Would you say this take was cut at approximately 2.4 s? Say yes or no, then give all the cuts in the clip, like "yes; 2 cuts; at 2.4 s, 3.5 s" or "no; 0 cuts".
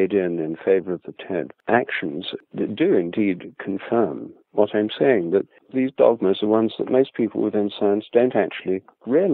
yes; 3 cuts; at 1.6 s, 2.4 s, 5.6 s